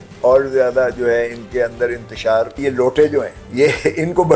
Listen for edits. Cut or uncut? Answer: cut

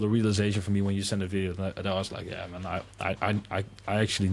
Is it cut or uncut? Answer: uncut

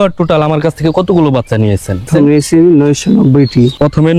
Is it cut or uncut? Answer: cut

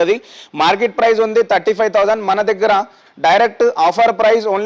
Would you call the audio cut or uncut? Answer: uncut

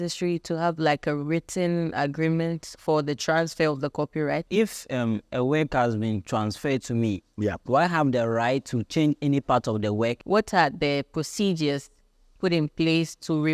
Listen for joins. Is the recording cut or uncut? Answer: cut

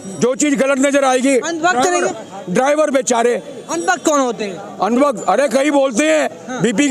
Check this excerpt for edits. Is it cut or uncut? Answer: uncut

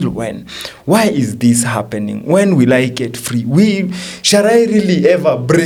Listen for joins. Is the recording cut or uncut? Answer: uncut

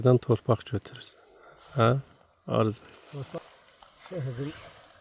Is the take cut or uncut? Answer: cut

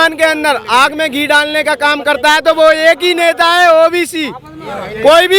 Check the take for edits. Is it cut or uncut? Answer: uncut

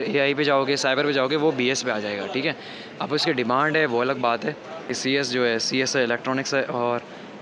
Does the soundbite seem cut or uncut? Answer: cut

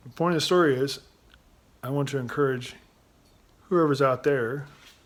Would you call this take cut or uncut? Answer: uncut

